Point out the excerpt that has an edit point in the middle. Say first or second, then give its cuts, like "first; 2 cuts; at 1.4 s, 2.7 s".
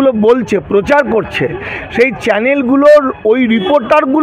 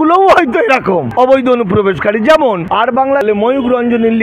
second; 2 cuts; at 1.1 s, 3.2 s